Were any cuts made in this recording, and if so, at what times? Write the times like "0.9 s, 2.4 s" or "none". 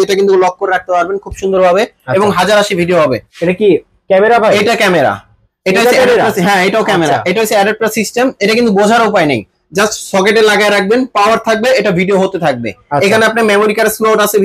3.3 s